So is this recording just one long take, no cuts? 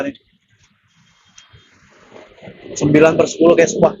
yes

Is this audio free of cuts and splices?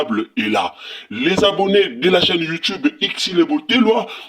yes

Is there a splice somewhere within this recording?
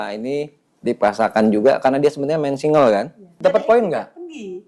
yes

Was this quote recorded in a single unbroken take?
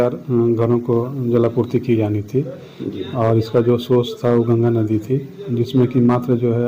yes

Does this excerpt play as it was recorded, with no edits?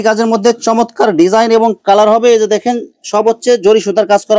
yes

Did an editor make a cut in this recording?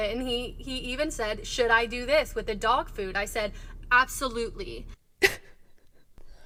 no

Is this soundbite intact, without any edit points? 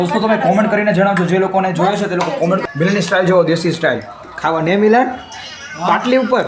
no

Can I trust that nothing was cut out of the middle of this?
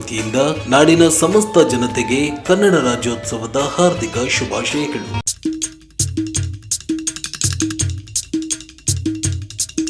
no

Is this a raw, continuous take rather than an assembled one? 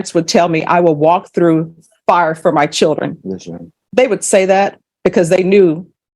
yes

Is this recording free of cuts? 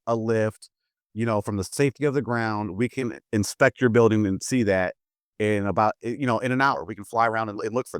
no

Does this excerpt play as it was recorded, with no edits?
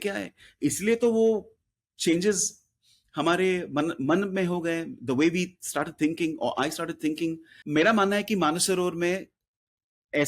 no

